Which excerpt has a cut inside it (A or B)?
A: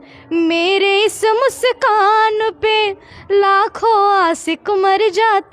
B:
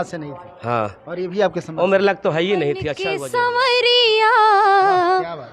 B